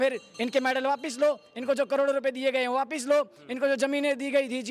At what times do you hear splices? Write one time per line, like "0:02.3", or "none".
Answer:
none